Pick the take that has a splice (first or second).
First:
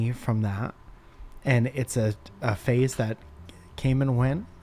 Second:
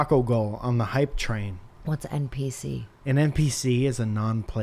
second